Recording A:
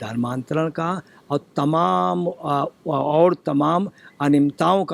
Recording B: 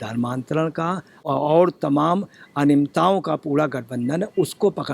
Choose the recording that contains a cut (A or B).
B